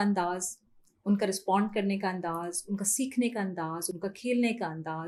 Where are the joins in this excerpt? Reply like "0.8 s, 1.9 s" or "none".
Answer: none